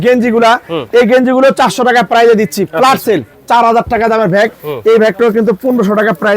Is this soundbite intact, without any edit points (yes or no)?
no